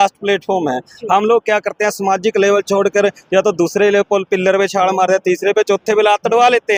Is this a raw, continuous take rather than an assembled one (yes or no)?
yes